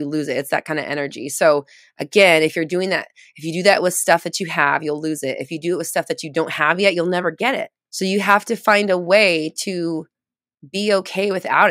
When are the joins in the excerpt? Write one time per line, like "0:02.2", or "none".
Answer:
none